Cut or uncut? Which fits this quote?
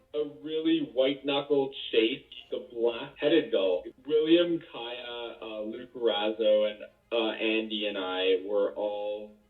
cut